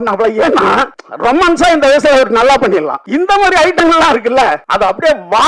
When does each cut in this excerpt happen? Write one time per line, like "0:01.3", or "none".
0:01.0
0:03.0
0:04.6